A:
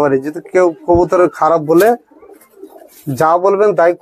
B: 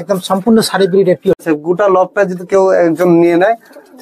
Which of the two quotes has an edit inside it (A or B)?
B